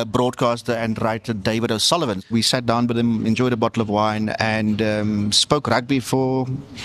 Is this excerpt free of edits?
no; 1 cut; at 2.3 s

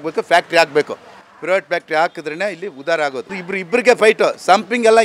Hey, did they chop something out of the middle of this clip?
yes; 1 cut; at 3.5 s

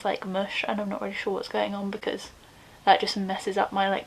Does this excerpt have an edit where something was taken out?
no; 0 cuts

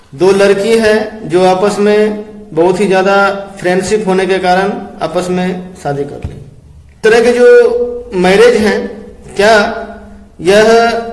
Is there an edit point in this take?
yes; 1 cut; at 7.0 s

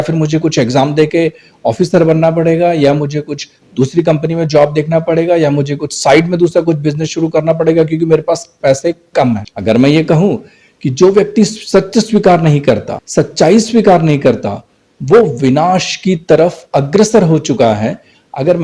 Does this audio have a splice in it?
yes; 1 cut; at 9.4 s

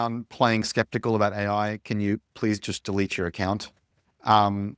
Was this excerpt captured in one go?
yes; 0 cuts

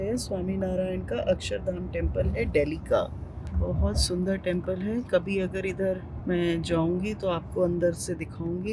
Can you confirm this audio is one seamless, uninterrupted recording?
yes; 0 cuts

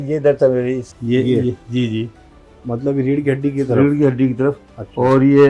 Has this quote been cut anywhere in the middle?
yes; 1 cut; at 0.9 s

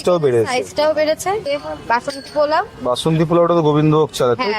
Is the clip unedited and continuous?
no; 1 cut; at 1.4 s

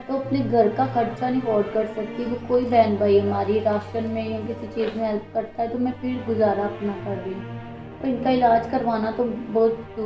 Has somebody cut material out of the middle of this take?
no; 0 cuts

